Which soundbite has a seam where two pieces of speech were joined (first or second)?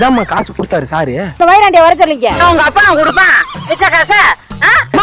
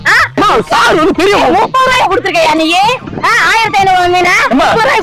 first